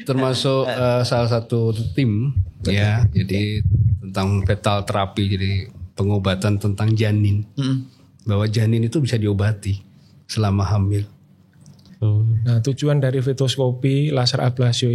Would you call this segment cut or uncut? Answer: cut